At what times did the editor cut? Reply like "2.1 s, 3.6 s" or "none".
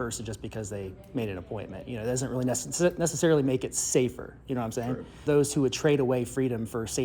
5.2 s